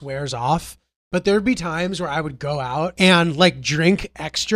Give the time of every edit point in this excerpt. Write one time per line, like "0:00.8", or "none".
0:02.9